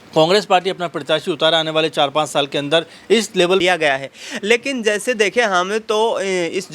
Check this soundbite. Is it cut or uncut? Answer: cut